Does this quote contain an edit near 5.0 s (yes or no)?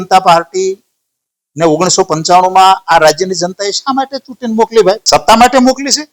yes